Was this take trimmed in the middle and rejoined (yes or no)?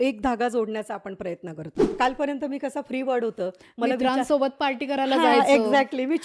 yes